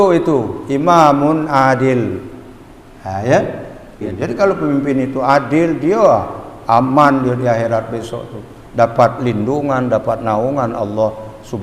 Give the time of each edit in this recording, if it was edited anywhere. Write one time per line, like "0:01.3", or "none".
0:04.1